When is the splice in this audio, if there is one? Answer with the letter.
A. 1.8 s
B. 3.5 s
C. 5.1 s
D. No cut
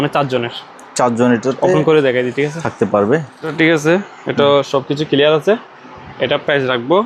B